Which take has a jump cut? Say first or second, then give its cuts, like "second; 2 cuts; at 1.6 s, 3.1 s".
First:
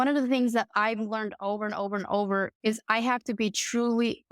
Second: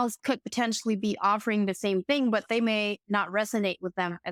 first; 1 cut; at 2.5 s